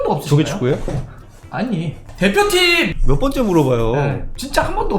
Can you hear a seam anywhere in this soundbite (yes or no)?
yes